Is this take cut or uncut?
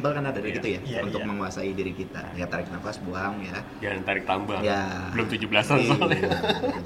uncut